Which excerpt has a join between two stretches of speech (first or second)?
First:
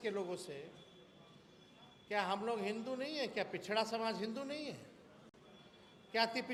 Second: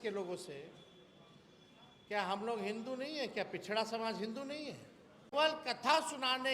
second